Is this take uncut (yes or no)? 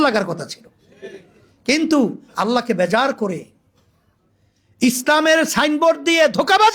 yes